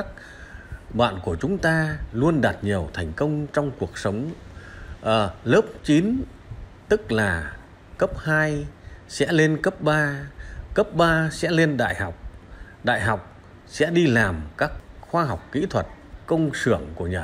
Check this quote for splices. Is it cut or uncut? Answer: cut